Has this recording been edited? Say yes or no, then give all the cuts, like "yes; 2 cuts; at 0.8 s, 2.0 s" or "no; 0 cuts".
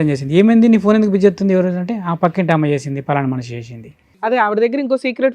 yes; 1 cut; at 4.3 s